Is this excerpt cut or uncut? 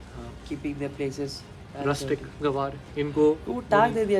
cut